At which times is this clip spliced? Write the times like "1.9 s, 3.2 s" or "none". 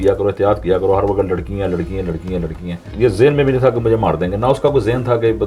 2.9 s